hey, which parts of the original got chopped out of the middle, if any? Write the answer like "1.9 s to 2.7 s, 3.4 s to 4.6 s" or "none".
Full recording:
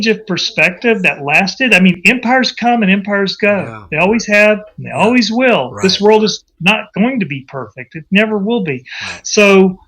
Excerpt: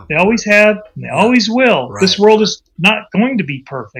none